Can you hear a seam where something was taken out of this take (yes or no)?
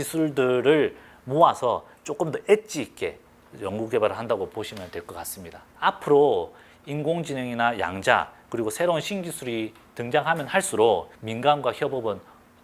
no